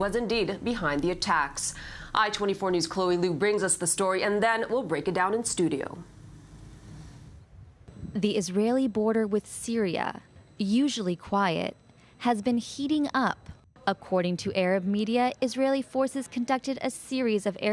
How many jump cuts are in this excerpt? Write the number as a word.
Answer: one